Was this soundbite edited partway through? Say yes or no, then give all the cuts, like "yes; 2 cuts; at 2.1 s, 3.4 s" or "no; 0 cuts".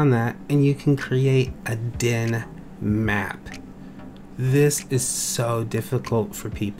no; 0 cuts